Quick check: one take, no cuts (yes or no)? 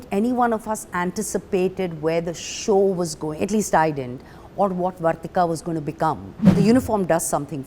no